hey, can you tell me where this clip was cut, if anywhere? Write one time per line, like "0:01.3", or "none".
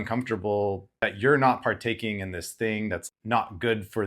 0:00.9
0:03.0